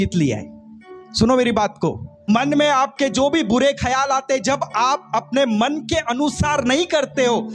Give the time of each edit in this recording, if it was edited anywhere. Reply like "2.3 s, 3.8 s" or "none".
2.3 s